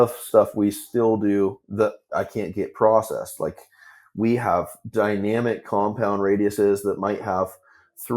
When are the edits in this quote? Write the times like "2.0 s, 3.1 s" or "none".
1.6 s